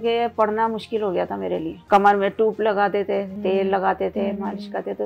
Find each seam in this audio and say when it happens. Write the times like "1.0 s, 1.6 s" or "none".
1.8 s, 3.3 s

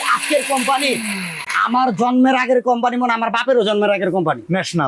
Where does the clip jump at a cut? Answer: none

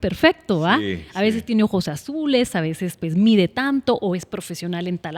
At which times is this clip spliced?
none

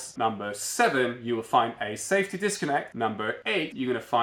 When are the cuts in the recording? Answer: none

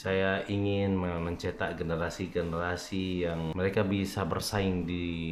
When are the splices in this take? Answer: 3.5 s

